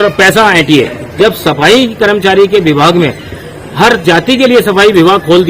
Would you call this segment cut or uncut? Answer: cut